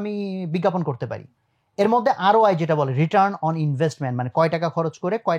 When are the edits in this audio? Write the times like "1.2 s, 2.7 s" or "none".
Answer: none